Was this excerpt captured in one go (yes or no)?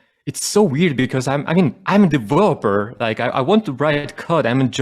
no